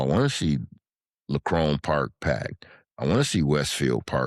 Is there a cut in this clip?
no; 0 cuts

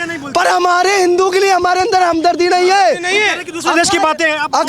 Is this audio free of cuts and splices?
yes; 0 cuts

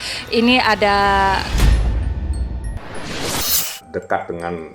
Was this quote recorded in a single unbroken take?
no; 2 cuts; at 1.5 s, 3.8 s

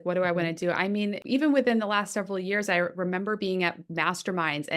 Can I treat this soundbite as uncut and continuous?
no; 1 cut; at 1.2 s

